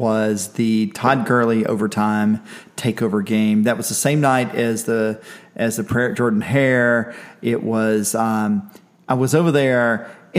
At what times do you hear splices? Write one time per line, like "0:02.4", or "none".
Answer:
none

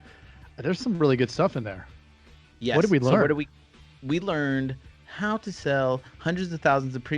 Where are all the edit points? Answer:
none

